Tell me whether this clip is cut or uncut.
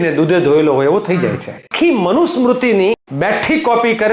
cut